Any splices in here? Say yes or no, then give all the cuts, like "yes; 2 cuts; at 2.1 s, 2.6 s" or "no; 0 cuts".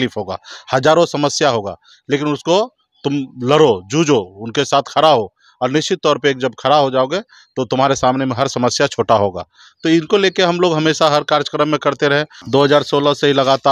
no; 0 cuts